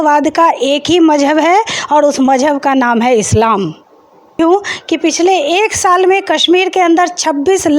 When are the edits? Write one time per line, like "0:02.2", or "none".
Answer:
0:04.4